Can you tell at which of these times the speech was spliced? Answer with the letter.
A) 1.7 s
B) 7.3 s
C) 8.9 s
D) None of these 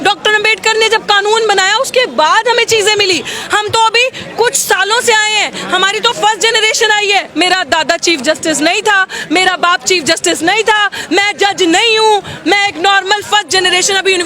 B